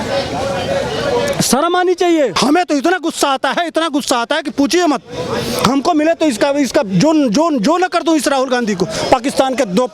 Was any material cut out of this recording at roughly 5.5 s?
no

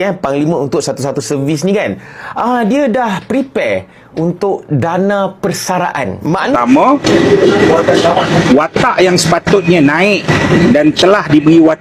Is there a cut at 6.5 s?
yes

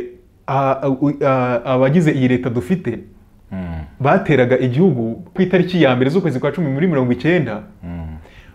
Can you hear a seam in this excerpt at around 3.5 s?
no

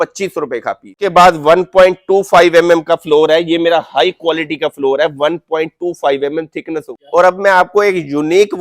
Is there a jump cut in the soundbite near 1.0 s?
yes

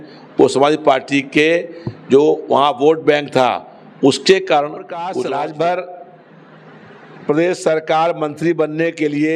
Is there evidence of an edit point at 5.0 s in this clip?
yes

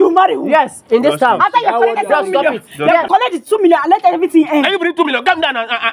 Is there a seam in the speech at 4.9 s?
no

